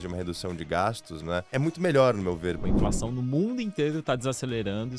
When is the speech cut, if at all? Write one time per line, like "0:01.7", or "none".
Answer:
0:01.5
0:02.7

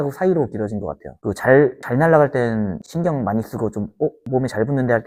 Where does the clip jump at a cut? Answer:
none

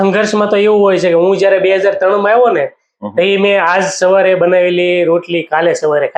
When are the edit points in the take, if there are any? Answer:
none

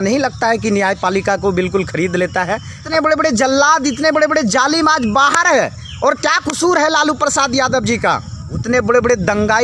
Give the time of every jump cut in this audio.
0:02.9
0:08.6

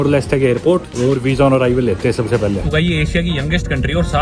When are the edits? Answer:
0:00.9
0:02.7

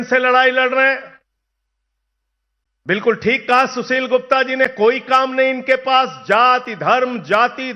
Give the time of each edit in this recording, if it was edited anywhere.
none

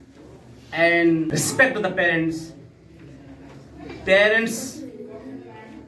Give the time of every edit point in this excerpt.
0:01.3

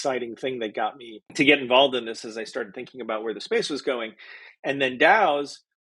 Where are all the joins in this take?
0:01.3

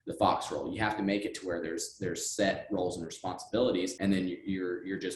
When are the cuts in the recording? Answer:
0:03.9

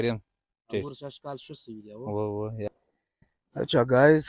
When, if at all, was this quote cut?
0:02.7

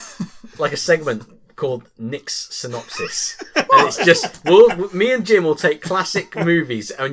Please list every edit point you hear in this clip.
0:03.3

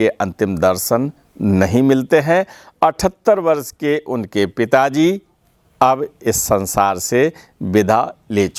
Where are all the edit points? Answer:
none

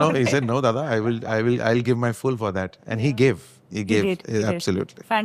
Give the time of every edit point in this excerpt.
none

